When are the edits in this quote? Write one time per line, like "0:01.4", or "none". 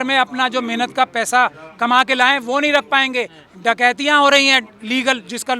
none